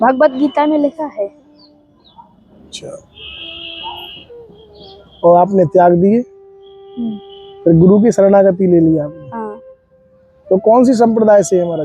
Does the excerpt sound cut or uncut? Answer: uncut